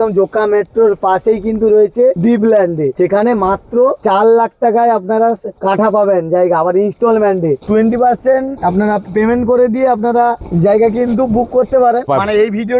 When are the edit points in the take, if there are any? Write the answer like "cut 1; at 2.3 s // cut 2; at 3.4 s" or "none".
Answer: cut 1; at 2.5 s // cut 2; at 4.0 s // cut 3; at 5.5 s // cut 4; at 7.6 s // cut 5; at 8.5 s // cut 6; at 10.4 s // cut 7; at 12.1 s